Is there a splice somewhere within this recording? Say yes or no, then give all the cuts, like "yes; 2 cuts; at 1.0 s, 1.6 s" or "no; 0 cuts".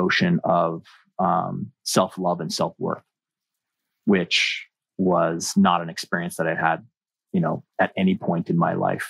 no; 0 cuts